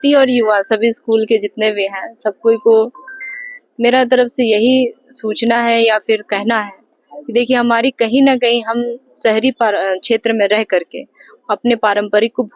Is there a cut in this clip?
no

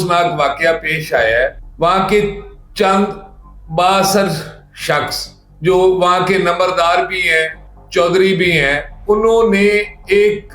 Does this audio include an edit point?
no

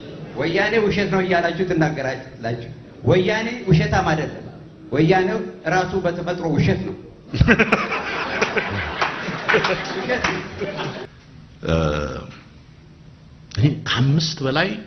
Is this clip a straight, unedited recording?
no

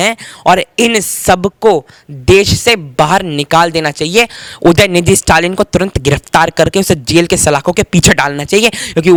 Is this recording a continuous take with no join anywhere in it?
yes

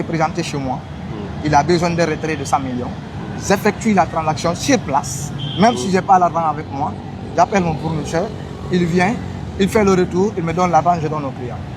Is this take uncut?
yes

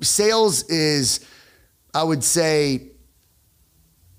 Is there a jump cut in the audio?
no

